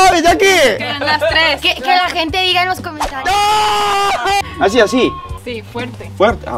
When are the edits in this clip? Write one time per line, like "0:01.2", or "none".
0:04.4